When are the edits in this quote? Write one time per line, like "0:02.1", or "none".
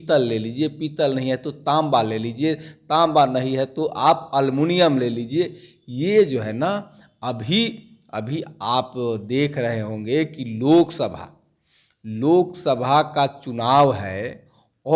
none